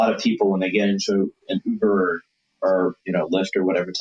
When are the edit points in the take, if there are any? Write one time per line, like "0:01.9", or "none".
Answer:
none